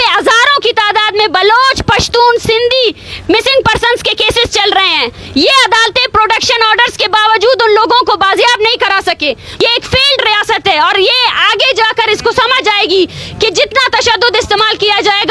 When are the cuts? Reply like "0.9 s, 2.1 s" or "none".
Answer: 9.6 s